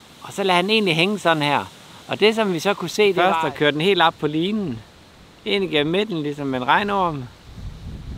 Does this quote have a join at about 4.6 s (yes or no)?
no